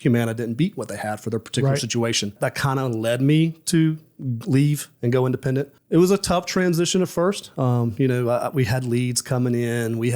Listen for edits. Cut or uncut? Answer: cut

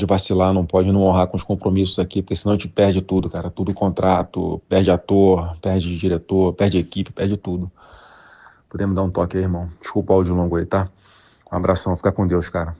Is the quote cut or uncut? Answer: cut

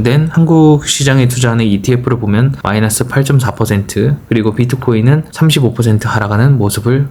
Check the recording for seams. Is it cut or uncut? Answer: uncut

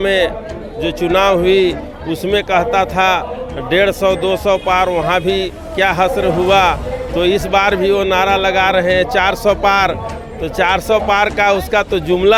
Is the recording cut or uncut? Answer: uncut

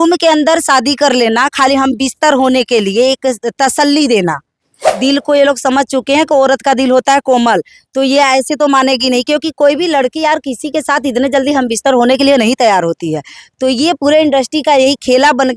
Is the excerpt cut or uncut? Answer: cut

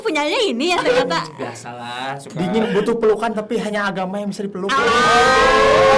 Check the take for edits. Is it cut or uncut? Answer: uncut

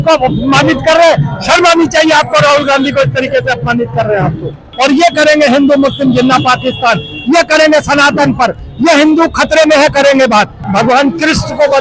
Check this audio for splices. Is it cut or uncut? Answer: cut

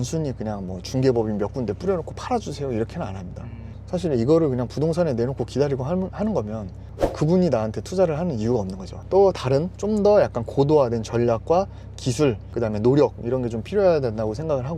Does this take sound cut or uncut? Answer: uncut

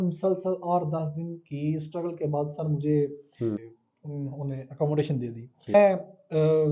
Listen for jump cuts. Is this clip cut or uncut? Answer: cut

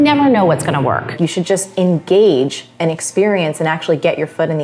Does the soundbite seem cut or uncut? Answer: cut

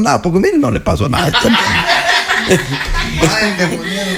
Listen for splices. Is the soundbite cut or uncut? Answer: uncut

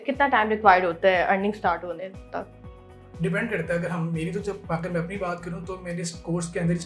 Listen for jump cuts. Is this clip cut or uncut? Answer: uncut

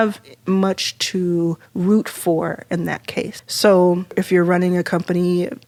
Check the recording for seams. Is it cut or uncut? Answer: uncut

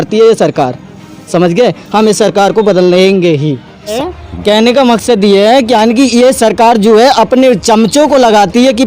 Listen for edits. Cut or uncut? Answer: cut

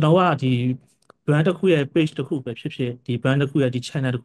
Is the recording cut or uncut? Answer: uncut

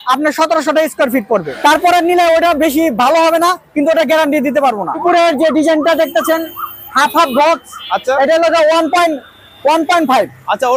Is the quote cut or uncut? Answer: cut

